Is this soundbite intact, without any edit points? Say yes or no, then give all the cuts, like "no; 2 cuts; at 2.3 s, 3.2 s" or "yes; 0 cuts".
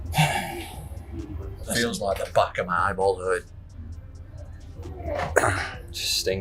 yes; 0 cuts